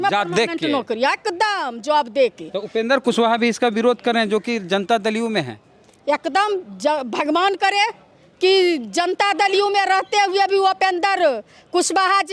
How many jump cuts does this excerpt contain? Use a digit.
0